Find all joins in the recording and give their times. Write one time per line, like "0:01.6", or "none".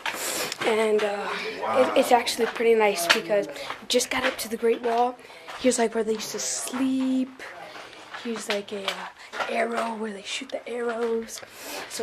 none

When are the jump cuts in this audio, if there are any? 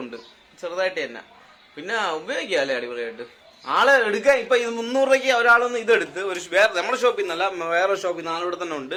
none

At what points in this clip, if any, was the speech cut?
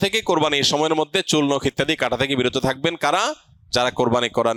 none

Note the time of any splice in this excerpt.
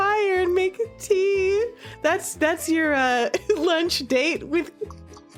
none

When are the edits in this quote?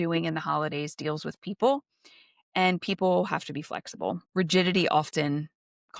0:04.2

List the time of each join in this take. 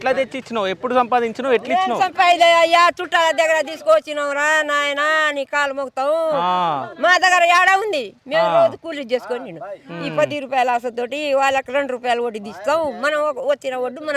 none

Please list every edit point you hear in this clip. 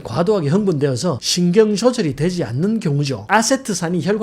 0:03.3

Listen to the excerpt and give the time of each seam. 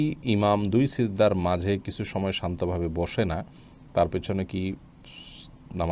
none

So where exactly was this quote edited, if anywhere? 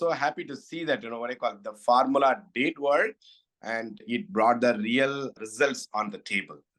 0:05.4

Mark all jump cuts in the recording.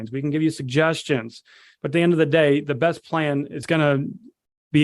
0:03.6

